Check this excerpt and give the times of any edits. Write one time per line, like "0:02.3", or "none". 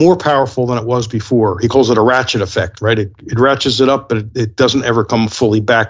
none